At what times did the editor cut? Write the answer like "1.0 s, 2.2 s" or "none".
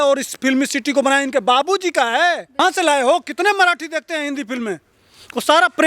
2.6 s